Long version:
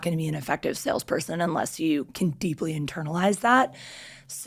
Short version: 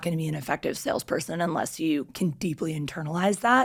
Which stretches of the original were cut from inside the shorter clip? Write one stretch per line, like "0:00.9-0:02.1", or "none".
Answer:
none